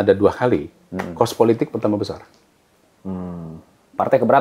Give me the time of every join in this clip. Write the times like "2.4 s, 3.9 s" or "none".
none